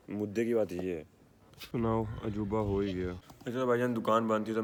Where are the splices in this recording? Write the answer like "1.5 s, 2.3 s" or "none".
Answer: none